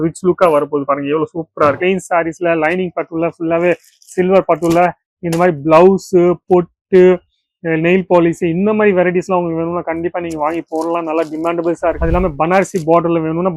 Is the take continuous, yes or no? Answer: no